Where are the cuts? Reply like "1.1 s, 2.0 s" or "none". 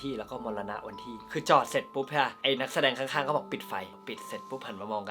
1.2 s, 2.4 s, 4.0 s